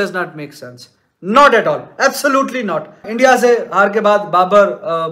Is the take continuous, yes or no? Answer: yes